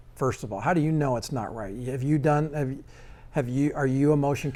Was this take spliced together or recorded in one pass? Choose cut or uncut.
uncut